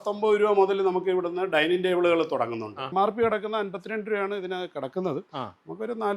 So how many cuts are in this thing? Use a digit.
1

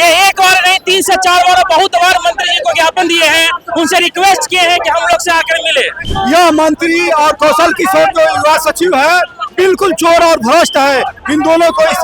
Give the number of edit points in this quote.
1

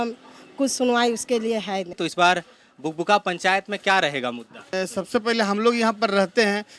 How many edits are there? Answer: 2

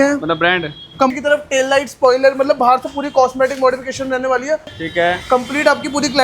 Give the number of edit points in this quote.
2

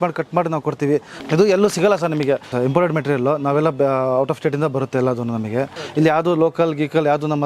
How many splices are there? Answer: 3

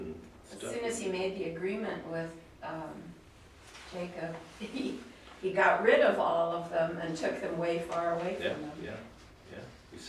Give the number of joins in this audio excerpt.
0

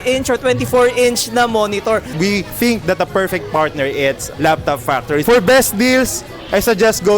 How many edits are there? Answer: 2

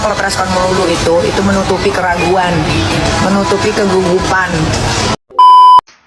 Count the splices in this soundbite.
1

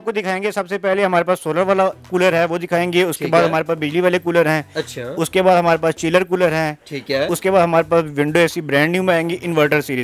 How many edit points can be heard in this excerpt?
0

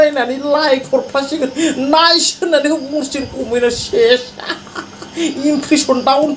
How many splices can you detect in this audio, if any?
0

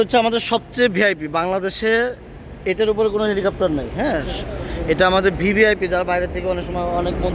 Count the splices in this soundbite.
0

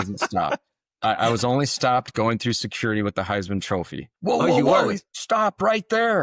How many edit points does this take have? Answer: 2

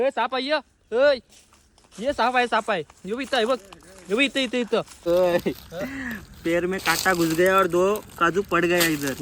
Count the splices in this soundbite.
1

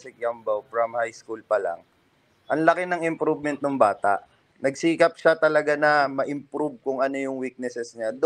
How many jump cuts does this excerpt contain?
1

